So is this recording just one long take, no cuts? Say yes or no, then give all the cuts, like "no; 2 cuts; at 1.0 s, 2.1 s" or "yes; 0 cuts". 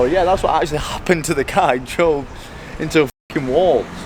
yes; 0 cuts